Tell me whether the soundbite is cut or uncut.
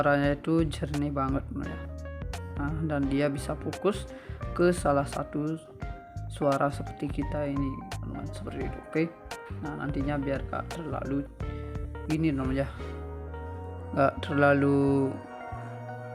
cut